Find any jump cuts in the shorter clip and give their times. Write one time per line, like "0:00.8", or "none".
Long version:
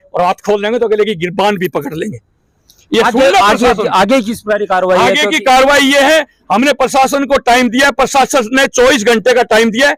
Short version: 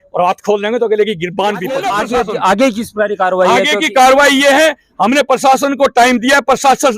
0:01.8